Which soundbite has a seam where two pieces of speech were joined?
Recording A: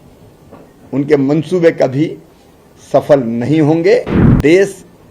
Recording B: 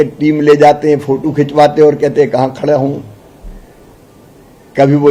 A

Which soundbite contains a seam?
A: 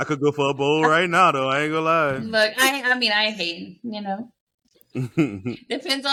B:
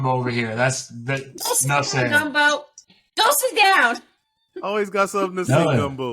B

